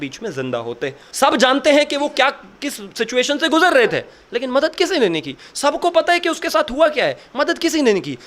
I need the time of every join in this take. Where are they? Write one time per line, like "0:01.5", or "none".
0:01.0